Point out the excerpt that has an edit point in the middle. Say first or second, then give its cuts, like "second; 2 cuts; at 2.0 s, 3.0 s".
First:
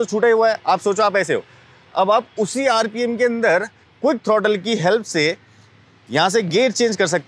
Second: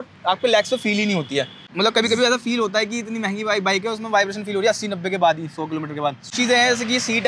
second; 2 cuts; at 1.6 s, 6.2 s